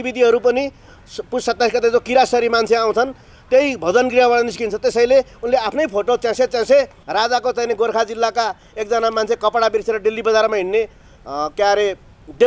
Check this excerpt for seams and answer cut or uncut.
cut